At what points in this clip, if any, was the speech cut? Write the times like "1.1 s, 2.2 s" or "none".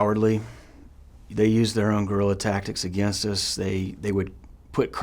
3.9 s